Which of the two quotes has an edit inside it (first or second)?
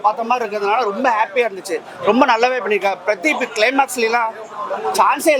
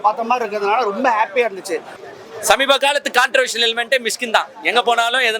second